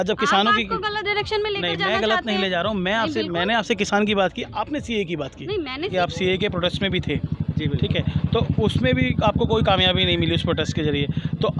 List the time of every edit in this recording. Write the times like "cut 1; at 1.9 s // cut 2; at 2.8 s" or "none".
cut 1; at 5.9 s